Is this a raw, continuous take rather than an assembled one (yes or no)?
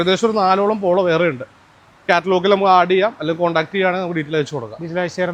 yes